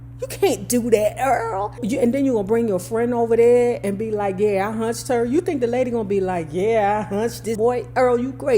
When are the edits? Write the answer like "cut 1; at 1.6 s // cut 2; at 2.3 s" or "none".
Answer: cut 1; at 7.6 s

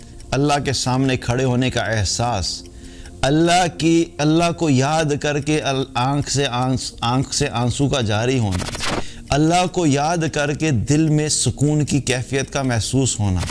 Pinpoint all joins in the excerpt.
none

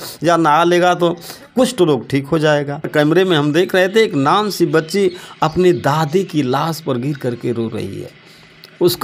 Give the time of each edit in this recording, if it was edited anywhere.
cut 1; at 2.9 s

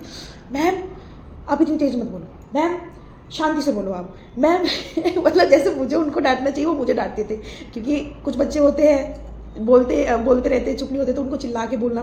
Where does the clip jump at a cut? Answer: none

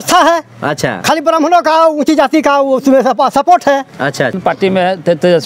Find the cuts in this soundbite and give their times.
cut 1; at 4.4 s

